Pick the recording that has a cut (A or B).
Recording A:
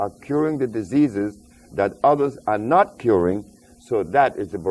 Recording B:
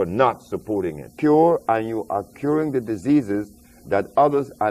B